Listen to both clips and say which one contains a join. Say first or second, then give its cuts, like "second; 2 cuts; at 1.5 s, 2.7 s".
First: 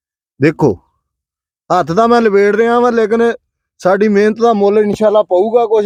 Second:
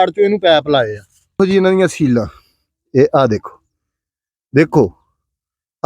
second; 1 cut; at 1.3 s